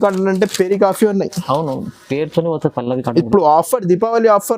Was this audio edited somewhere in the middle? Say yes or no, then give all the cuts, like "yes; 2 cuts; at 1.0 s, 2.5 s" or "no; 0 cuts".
no; 0 cuts